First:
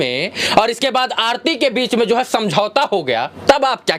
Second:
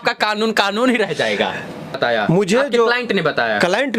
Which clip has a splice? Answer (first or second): second